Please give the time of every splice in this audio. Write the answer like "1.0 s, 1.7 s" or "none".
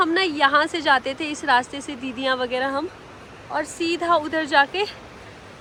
none